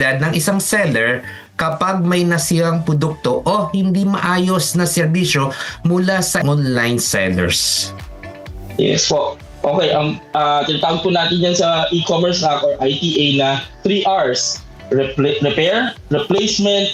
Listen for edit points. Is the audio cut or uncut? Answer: uncut